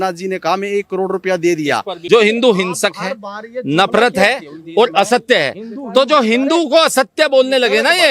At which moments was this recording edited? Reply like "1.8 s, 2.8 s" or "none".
1.9 s